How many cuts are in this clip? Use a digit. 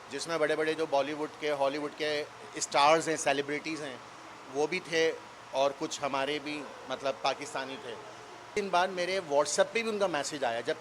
1